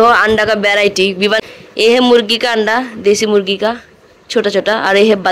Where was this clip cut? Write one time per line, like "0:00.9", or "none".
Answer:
0:01.4